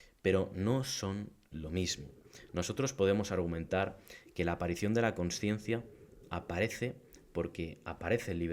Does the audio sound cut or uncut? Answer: uncut